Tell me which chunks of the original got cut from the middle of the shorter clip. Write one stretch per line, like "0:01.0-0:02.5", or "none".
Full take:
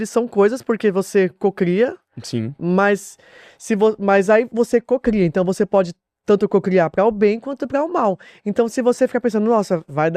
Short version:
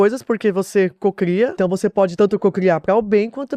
0:02.4-0:06.1